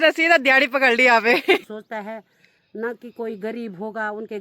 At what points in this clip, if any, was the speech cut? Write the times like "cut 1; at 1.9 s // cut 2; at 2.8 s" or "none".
cut 1; at 1.6 s